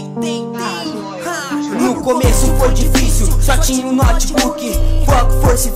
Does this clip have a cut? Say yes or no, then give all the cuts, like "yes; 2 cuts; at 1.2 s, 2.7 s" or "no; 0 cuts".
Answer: no; 0 cuts